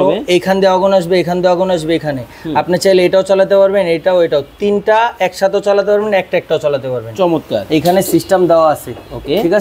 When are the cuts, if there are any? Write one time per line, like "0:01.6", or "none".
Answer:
none